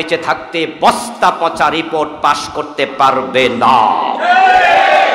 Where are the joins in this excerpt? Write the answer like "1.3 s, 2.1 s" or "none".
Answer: none

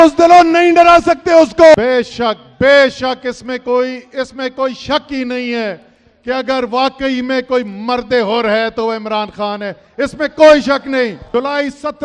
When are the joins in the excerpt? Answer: 1.7 s, 11.2 s

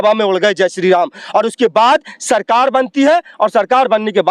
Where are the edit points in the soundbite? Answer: none

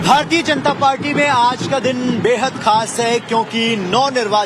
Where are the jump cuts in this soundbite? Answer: none

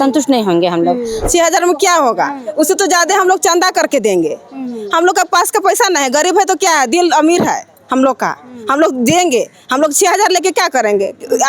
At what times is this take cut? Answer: 1.2 s

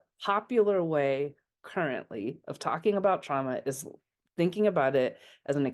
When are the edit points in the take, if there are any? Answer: none

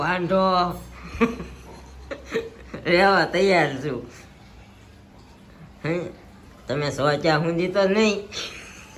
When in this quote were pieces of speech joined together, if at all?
none

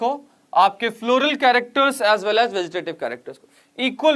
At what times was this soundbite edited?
none

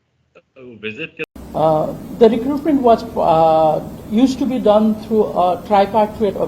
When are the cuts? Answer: 1.3 s

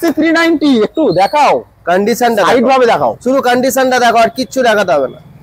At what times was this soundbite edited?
none

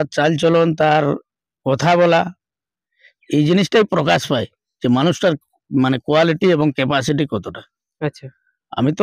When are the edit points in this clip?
none

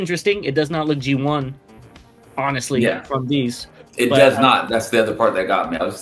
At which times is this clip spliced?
none

